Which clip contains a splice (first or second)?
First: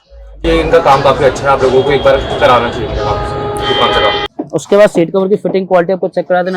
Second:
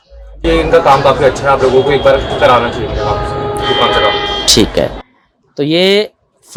first